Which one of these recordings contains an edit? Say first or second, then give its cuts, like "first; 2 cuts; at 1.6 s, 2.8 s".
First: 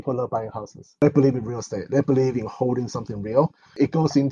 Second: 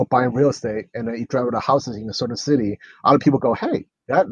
first; 1 cut; at 1.0 s